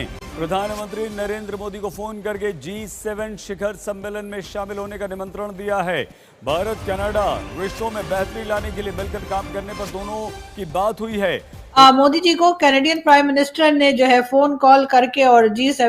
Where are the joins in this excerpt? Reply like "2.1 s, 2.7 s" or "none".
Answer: 11.6 s